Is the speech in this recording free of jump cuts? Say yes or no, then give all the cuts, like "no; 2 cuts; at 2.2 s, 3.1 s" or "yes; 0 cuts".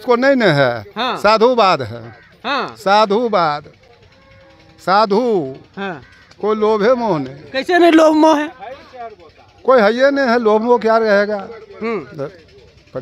yes; 0 cuts